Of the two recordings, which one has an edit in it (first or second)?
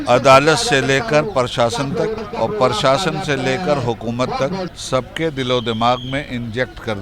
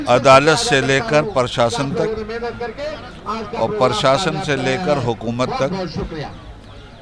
first